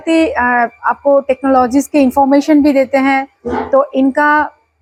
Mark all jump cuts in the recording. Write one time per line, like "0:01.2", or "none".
none